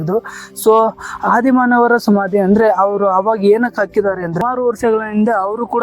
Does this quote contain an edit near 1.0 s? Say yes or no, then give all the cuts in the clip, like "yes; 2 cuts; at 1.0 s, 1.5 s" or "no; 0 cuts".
no; 1 cut; at 4.4 s